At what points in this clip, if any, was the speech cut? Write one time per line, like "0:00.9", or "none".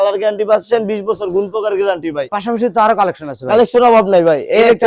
0:02.2